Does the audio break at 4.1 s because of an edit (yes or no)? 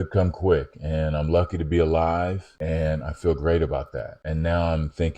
yes